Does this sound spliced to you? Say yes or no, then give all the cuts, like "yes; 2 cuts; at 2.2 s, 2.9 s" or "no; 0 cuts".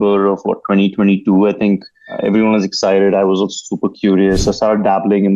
yes; 1 cut; at 2.2 s